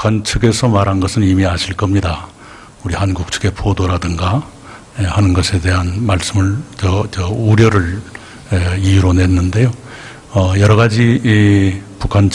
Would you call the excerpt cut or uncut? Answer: cut